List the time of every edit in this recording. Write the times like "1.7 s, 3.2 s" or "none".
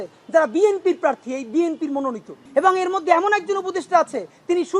2.3 s